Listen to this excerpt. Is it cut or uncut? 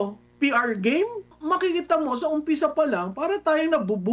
cut